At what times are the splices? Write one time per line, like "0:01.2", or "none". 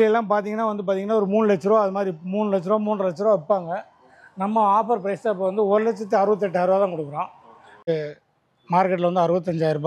0:07.8